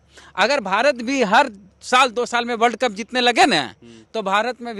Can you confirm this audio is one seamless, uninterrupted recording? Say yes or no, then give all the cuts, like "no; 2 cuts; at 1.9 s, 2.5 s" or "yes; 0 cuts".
yes; 0 cuts